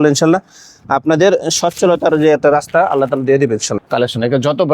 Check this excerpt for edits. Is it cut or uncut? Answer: cut